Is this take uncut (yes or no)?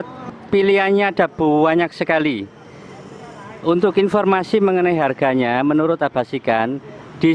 yes